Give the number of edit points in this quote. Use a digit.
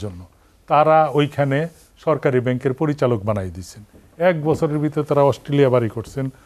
0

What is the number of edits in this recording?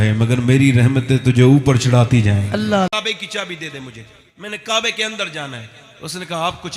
1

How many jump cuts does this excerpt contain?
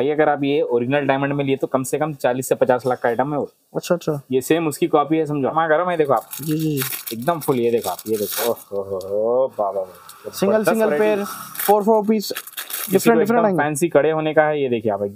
1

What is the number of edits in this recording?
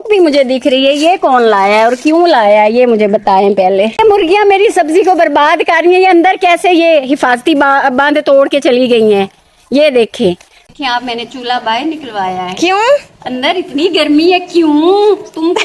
2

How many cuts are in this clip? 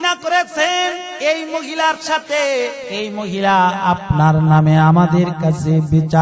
2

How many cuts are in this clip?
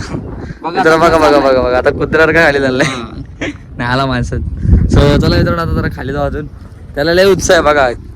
1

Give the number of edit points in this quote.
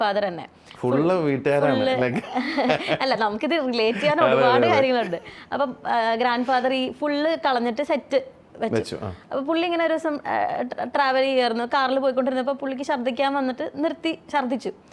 0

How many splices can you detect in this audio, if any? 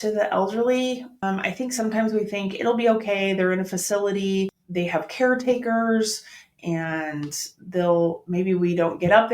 2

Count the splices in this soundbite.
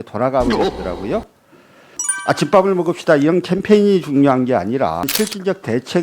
2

